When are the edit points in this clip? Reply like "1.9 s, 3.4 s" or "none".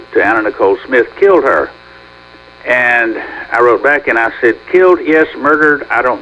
none